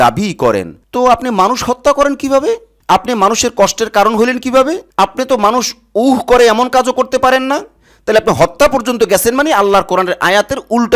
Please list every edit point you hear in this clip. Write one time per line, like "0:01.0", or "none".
none

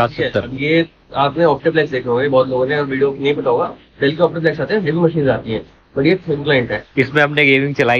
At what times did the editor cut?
0:06.8

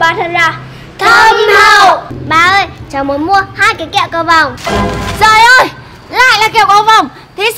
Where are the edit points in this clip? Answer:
0:02.1
0:04.5

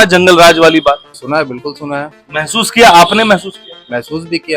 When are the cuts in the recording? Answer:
0:01.1

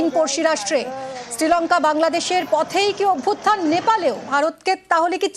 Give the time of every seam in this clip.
0:04.3

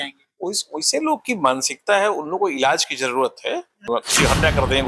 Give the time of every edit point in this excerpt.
0:03.8

